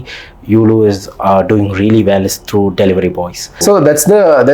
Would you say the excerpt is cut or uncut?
cut